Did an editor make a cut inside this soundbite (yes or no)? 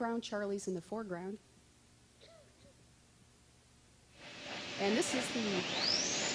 no